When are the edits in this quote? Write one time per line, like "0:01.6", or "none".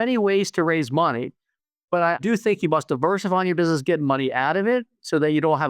0:02.2